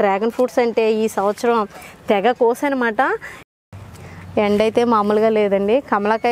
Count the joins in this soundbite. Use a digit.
1